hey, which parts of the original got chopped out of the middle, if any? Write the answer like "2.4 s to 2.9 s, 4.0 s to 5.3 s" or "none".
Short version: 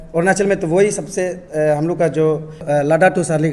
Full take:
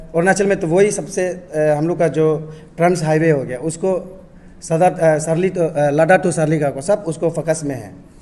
2.6 s to 5.7 s